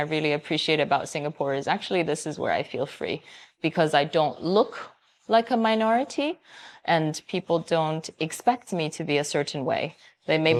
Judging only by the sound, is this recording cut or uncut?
uncut